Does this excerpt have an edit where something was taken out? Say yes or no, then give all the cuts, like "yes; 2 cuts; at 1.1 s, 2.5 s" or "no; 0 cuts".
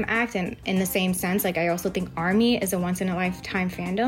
no; 0 cuts